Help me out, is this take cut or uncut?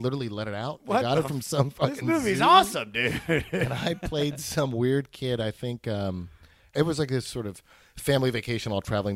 cut